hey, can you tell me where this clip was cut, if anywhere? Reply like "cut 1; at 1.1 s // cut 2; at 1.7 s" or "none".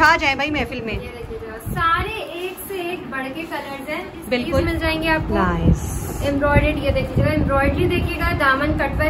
cut 1; at 4.6 s

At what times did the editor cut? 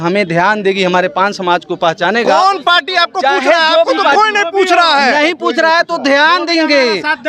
none

